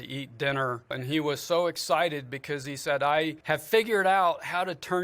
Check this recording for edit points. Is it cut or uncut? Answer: cut